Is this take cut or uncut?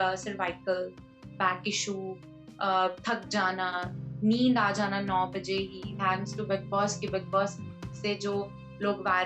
cut